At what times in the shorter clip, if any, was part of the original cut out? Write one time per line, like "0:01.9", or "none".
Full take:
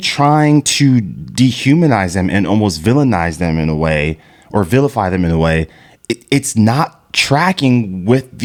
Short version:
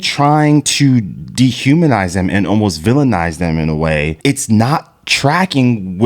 0:04.2